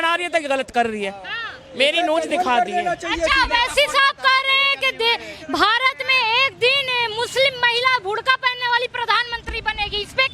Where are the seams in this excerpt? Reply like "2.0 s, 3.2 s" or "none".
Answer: none